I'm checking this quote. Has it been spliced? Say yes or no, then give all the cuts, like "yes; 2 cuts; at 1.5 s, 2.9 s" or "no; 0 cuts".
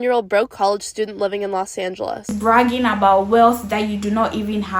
yes; 1 cut; at 2.3 s